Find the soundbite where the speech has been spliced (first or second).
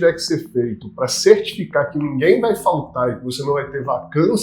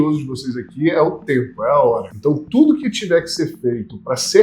second